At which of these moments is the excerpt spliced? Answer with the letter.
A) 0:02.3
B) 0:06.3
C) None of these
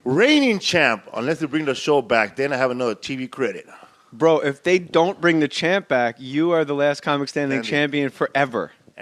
C